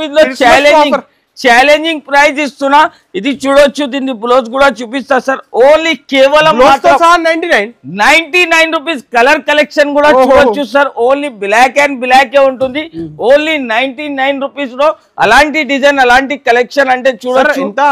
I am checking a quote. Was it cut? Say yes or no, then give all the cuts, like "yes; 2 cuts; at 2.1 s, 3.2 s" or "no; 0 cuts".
no; 0 cuts